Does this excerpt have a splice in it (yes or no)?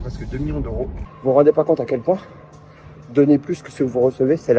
yes